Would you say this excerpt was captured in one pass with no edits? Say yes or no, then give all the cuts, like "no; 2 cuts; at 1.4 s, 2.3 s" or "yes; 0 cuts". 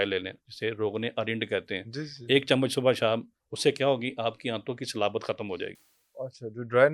yes; 0 cuts